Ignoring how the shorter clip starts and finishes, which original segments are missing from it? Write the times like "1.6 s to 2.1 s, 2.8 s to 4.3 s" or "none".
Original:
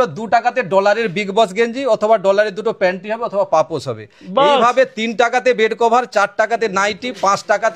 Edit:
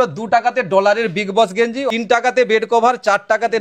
1.8 s to 4.9 s